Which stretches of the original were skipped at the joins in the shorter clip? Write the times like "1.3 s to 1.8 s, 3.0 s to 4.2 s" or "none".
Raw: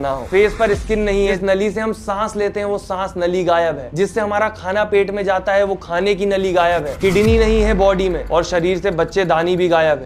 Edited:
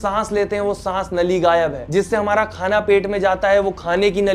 none